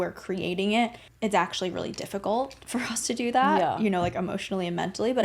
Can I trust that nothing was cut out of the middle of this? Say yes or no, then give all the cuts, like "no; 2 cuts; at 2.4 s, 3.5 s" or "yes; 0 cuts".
no; 1 cut; at 1.0 s